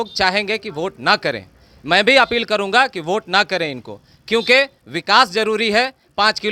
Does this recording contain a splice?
no; 0 cuts

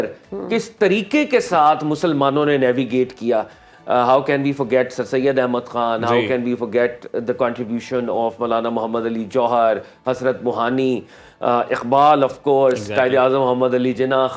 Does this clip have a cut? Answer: no; 0 cuts

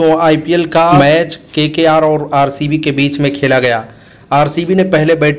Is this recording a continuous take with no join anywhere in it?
no; 1 cut; at 1.0 s

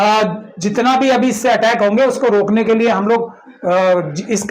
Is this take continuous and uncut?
yes; 0 cuts

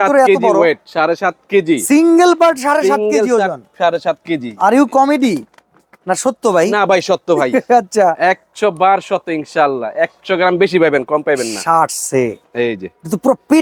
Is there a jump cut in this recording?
no; 0 cuts

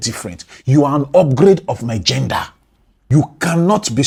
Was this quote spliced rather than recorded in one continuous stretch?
no; 0 cuts

